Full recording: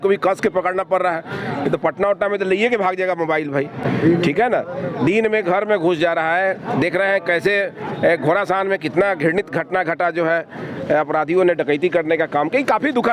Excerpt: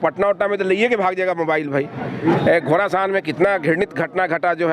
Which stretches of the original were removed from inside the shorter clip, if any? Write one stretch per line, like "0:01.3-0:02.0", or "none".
0:03.9-0:07.6